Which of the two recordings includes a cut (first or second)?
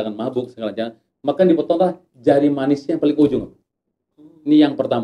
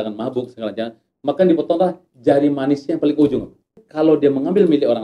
second